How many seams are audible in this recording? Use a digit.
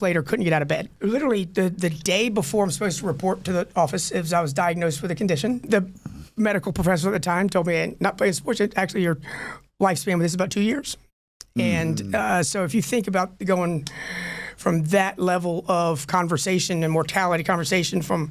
2